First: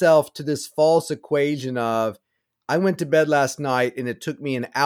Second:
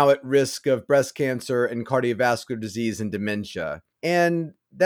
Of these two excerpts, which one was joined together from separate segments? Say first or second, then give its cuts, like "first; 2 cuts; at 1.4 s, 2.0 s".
second; 1 cut; at 3.9 s